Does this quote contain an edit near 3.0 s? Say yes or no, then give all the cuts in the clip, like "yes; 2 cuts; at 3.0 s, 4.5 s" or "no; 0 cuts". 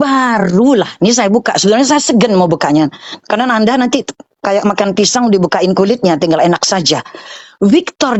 no; 0 cuts